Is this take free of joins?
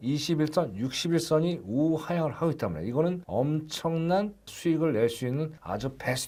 yes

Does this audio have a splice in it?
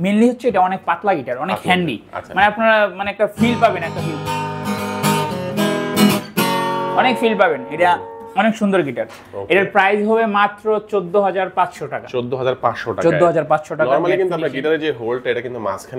no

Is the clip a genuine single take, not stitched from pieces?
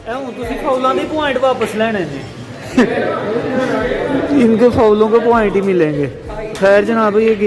yes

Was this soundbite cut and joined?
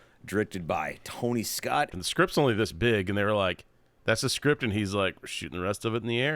yes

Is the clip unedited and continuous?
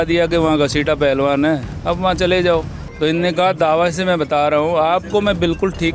no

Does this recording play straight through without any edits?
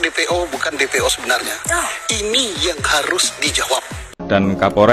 no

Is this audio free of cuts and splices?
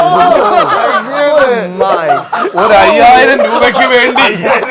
yes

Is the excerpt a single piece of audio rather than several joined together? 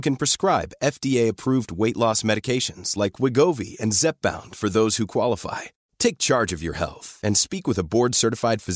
yes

